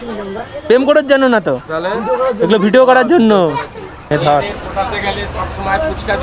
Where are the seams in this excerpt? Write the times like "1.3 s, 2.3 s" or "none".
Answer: 4.0 s